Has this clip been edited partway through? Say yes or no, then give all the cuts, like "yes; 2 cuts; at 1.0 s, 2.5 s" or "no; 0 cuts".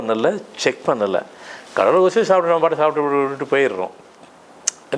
no; 0 cuts